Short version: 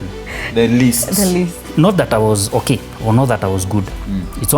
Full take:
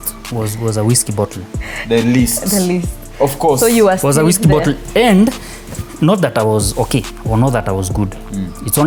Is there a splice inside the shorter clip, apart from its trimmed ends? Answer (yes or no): yes